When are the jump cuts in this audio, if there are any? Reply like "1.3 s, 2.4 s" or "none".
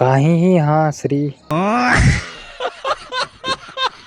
1.5 s